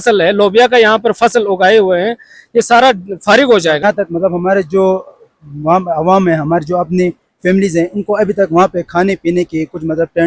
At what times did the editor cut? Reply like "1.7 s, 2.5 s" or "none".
3.8 s